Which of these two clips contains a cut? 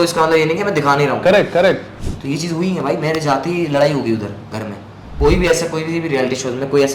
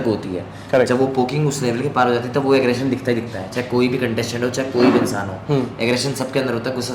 first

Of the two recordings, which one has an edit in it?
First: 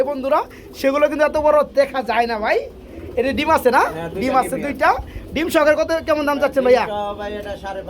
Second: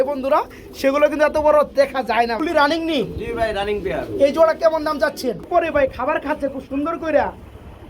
second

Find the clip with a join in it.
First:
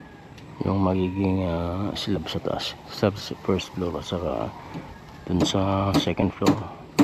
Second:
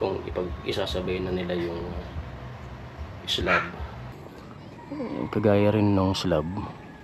second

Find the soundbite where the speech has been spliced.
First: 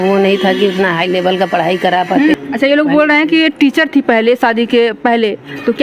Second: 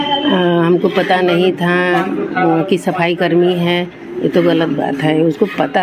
first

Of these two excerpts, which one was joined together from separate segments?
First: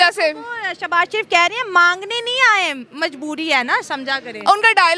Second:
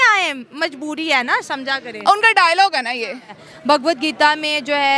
second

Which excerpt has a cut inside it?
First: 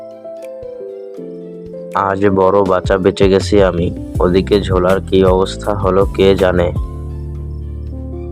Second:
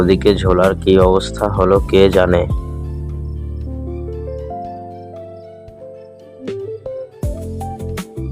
second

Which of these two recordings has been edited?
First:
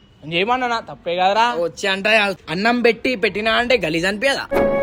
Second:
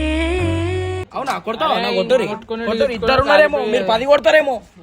second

